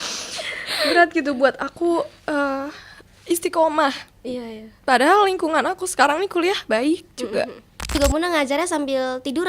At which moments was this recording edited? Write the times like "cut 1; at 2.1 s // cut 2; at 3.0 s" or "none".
cut 1; at 7.9 s